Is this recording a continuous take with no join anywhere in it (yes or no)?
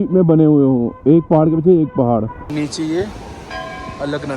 no